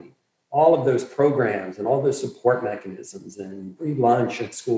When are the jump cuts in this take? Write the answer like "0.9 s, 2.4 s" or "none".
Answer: 3.8 s